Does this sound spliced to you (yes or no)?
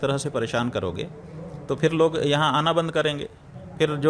no